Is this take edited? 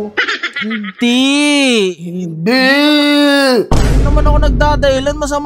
no; 0 cuts

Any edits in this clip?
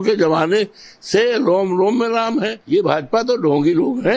no; 0 cuts

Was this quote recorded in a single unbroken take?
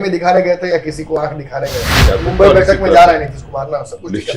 no; 1 cut; at 2.0 s

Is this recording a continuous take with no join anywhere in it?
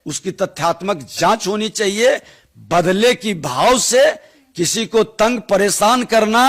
yes; 0 cuts

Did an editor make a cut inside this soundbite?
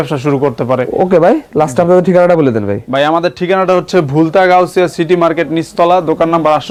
no; 0 cuts

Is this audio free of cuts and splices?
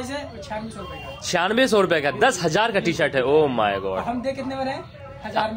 yes; 0 cuts

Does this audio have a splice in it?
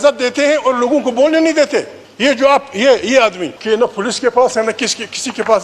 yes; 2 cuts; at 1.6 s, 3.5 s

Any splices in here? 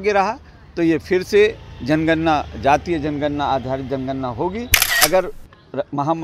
yes; 1 cut; at 4.8 s

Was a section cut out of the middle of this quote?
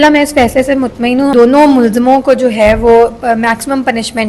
yes; 1 cut; at 1.3 s

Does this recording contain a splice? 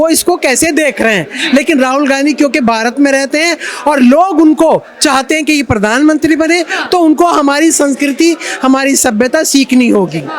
no; 0 cuts

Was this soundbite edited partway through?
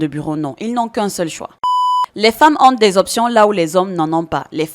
yes; 1 cut; at 1.7 s

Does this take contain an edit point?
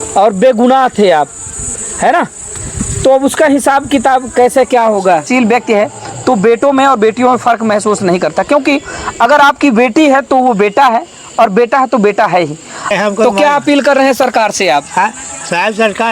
yes; 2 cuts; at 5.3 s, 12.9 s

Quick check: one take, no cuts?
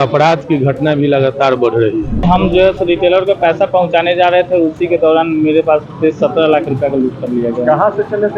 no; 1 cut; at 2.2 s

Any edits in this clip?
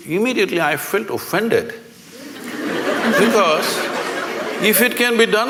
no; 0 cuts

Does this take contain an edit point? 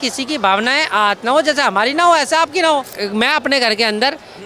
yes; 1 cut; at 2.9 s

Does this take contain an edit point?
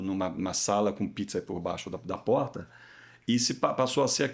no; 0 cuts

